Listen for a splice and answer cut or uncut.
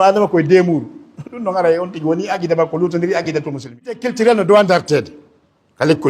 cut